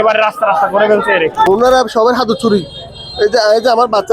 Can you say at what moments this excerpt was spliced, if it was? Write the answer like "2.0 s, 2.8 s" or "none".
1.5 s

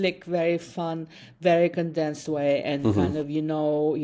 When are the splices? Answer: none

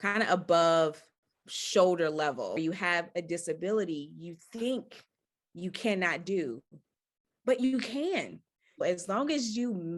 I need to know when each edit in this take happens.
2.6 s, 8.8 s

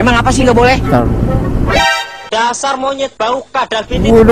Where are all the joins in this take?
1.1 s

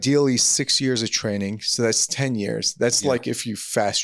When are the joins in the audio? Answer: none

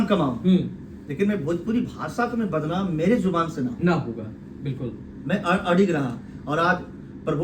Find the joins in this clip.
none

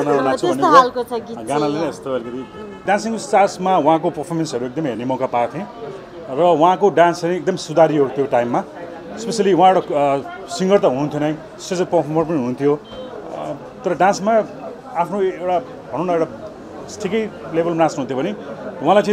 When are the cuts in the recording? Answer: 2.8 s

